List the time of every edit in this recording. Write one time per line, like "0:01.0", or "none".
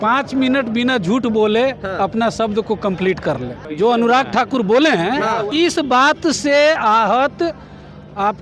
0:03.5
0:05.5